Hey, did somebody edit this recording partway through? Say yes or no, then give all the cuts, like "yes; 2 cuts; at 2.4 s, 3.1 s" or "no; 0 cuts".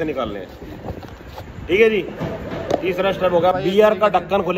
yes; 1 cut; at 3.5 s